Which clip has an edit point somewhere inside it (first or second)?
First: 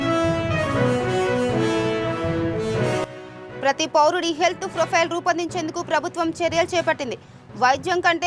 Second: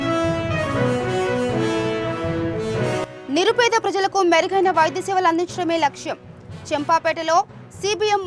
first